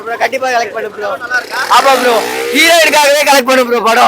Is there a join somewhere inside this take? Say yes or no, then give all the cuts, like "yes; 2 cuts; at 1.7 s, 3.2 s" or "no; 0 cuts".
no; 0 cuts